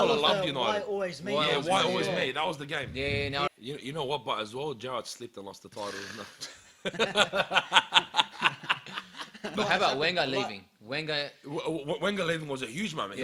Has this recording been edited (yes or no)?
yes